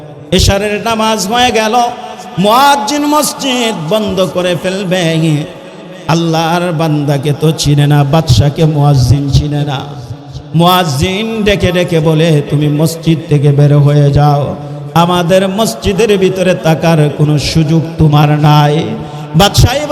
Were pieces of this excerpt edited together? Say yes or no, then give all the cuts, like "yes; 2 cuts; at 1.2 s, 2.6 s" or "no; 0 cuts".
no; 0 cuts